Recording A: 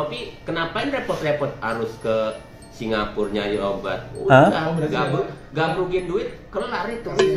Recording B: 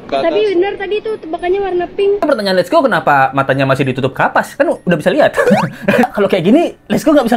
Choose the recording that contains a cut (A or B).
B